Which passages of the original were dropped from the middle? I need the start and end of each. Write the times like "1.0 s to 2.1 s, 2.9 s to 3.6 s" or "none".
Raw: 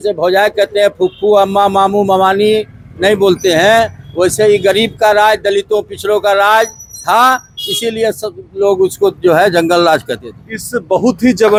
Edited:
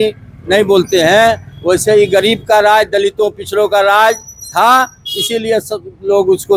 none